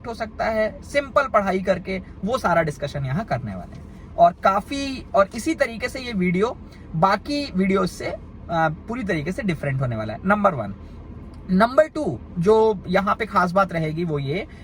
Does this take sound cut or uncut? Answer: uncut